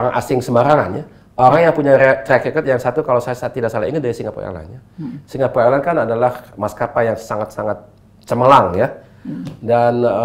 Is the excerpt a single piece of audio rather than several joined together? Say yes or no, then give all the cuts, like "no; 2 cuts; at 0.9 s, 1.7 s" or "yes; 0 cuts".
yes; 0 cuts